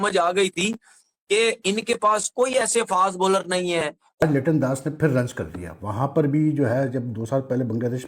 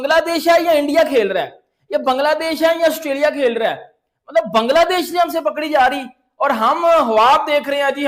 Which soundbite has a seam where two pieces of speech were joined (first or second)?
first